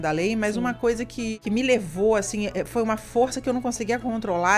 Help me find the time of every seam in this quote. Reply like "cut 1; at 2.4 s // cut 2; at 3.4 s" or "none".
cut 1; at 1.3 s